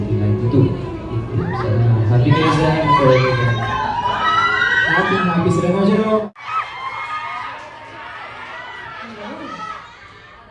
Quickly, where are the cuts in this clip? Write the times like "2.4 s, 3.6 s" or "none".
6.3 s